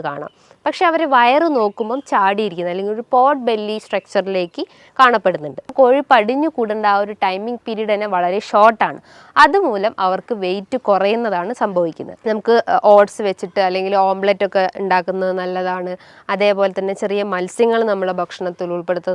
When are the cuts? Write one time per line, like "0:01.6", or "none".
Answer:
0:05.7
0:12.1